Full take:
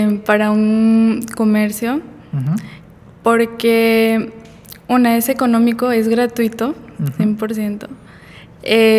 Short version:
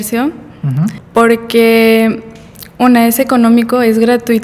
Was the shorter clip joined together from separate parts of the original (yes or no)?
yes